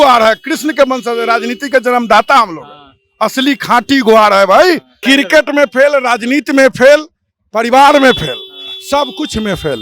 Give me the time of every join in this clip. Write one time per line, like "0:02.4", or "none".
0:04.9